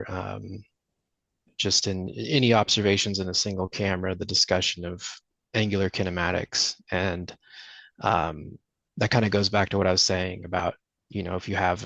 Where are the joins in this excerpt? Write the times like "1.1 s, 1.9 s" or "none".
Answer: none